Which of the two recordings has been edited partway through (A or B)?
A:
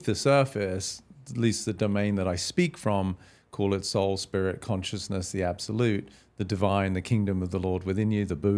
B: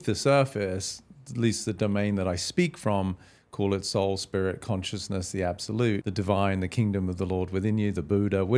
B